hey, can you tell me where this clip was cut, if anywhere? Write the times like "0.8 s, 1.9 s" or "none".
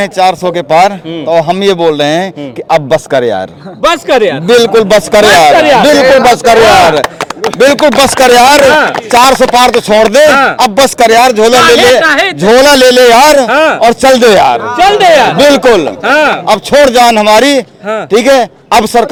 none